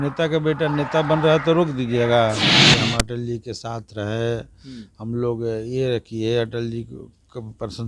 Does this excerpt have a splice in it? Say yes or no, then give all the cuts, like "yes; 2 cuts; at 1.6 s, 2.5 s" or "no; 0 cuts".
yes; 1 cut; at 2.6 s